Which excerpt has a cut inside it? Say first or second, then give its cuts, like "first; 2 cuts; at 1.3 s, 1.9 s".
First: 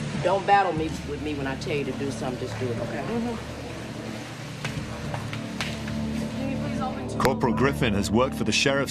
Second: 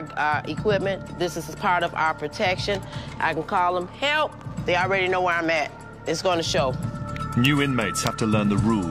first; 1 cut; at 7.2 s